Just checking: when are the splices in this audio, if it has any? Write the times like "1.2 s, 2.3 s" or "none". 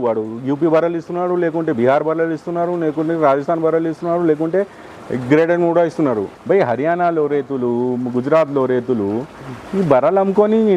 6.3 s